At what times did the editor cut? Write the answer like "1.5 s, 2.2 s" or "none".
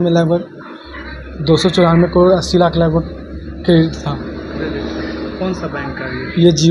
none